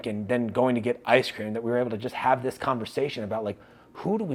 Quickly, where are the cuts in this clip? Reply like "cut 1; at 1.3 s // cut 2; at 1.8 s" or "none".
none